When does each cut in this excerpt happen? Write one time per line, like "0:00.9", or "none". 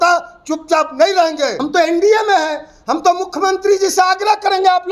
0:01.6